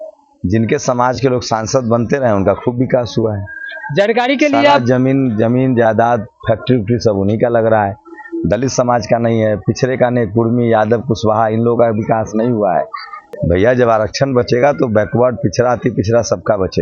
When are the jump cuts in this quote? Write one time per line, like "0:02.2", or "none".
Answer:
0:13.3